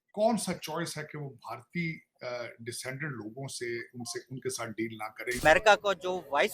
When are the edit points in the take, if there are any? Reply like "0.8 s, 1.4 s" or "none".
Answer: 5.4 s